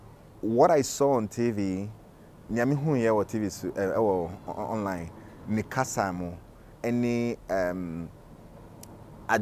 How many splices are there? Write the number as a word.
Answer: zero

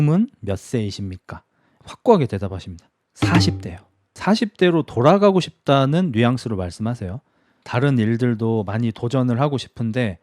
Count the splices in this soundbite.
three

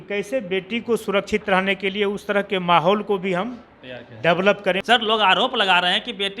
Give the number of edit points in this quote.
one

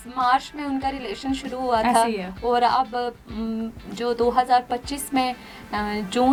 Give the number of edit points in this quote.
zero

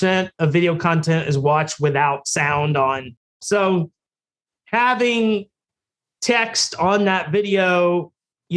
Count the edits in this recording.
one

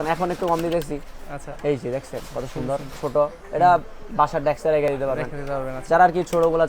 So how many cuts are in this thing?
zero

